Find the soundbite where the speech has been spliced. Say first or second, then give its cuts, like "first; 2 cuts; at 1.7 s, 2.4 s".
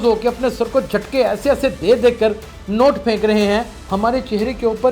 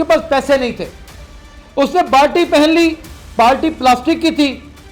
first; 1 cut; at 3.8 s